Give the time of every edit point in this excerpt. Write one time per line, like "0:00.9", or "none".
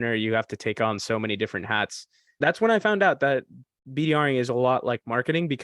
0:02.4

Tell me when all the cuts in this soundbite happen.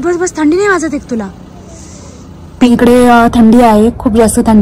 0:02.7

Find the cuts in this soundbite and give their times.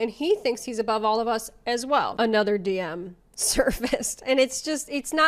0:02.1

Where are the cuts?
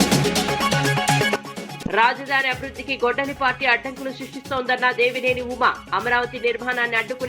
0:01.6

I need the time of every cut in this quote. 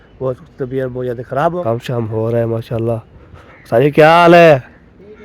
0:01.6

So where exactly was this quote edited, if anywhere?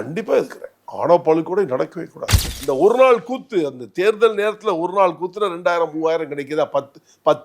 0:02.5

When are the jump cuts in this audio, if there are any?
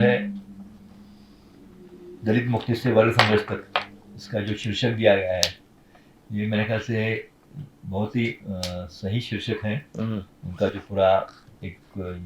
none

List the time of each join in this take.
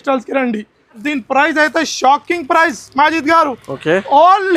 0:01.0

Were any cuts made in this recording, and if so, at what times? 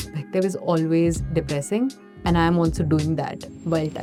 none

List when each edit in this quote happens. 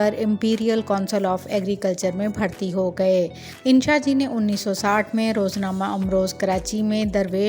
0:03.5

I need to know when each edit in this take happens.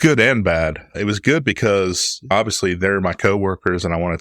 0:00.9
0:02.3

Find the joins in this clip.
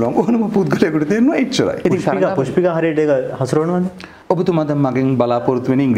0:01.8
0:04.1

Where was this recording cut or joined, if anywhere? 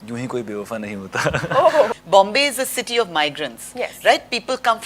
0:02.0

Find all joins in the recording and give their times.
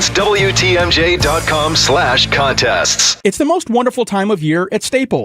0:03.1

